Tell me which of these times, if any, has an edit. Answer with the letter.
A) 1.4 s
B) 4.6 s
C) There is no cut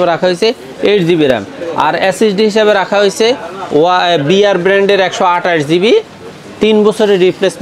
C